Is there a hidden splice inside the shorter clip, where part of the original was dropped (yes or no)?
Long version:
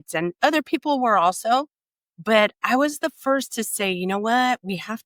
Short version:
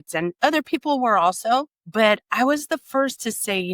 yes